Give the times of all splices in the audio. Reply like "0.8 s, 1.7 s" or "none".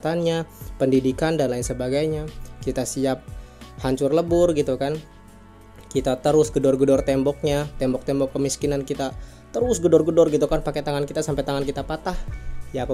none